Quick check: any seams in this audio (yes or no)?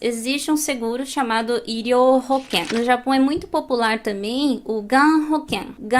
yes